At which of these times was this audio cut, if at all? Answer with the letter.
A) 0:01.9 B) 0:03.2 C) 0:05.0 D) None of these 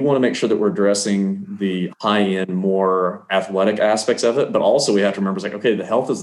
D